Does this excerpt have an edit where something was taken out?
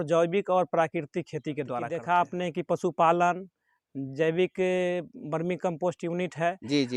yes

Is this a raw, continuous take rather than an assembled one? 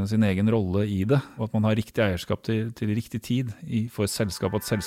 no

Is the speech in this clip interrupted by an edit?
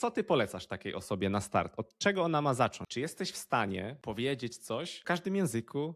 yes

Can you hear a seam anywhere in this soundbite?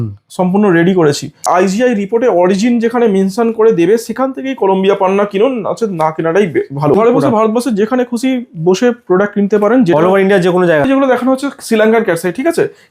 yes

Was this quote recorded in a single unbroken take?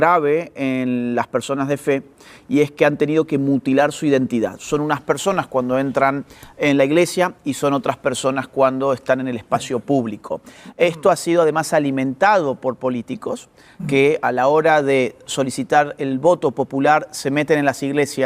yes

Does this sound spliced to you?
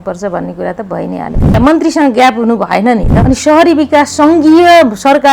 yes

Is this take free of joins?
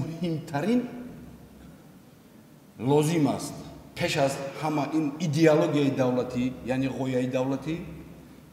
yes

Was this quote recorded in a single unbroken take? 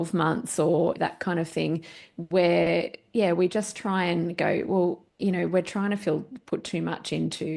no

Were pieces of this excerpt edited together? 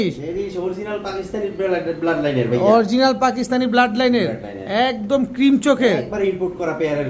no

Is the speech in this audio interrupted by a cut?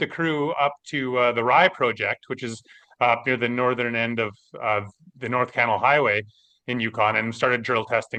no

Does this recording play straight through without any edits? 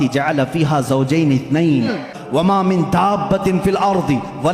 no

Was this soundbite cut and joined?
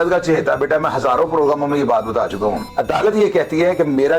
yes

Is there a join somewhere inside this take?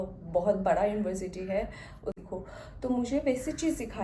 yes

